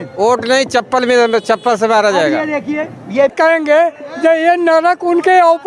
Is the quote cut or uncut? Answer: cut